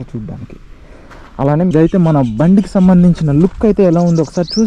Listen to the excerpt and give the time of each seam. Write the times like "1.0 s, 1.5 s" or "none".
1.7 s